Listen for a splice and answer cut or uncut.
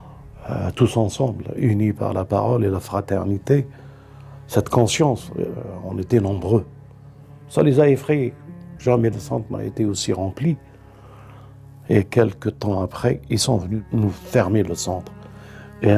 cut